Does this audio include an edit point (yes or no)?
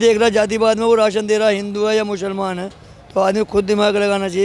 no